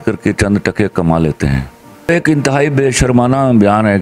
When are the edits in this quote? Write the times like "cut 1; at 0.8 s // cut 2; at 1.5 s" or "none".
cut 1; at 2.1 s